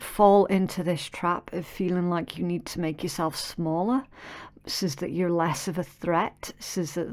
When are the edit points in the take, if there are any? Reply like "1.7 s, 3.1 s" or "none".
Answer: none